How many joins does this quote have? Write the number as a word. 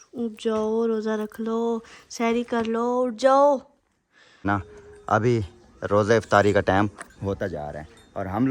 one